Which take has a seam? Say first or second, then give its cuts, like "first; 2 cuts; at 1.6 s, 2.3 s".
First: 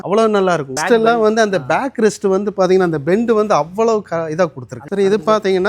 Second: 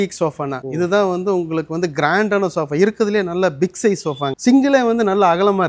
first; 1 cut; at 4.8 s